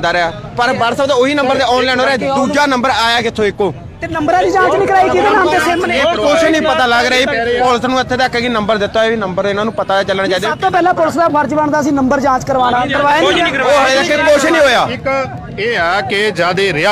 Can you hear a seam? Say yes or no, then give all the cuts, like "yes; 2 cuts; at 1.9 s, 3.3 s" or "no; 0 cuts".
no; 0 cuts